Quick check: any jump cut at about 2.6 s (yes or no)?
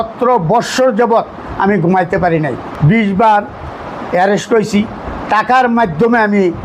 yes